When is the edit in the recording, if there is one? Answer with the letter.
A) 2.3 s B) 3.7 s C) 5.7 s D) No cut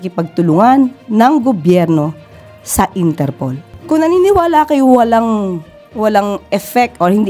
B